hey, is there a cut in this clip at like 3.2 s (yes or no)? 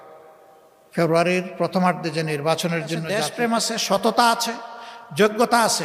yes